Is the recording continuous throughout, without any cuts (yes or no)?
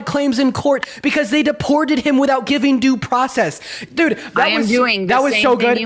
yes